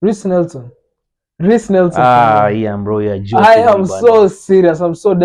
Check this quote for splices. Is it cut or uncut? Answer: uncut